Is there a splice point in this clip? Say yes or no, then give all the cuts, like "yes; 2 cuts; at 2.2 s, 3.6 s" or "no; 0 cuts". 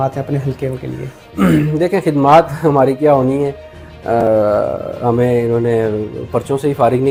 no; 0 cuts